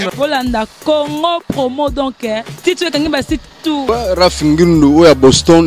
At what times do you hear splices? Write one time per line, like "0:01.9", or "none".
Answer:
0:03.8